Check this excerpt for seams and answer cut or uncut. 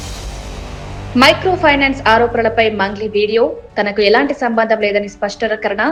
uncut